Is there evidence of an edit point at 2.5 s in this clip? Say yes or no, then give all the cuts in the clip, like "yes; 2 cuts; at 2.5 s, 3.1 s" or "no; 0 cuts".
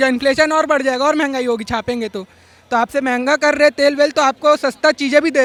no; 0 cuts